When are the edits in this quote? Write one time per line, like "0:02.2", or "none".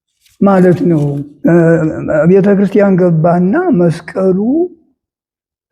0:01.2